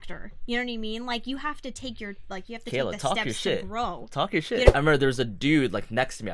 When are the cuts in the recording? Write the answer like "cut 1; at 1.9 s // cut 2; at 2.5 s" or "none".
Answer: cut 1; at 4.7 s